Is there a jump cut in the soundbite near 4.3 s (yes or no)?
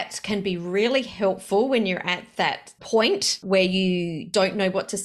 yes